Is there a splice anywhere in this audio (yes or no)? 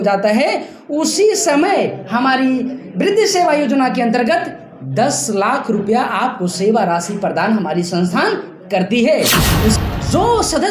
yes